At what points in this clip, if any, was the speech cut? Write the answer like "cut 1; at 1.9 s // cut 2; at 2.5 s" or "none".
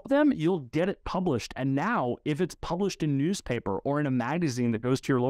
none